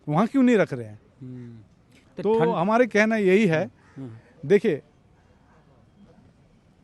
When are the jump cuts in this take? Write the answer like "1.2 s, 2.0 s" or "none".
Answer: none